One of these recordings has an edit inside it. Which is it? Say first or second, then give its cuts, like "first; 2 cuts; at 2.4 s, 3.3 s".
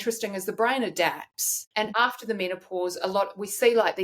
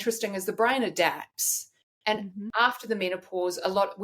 first; 1 cut; at 1.9 s